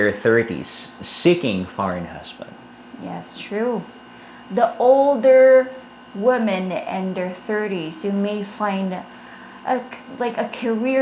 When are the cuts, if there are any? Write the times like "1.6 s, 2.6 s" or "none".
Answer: none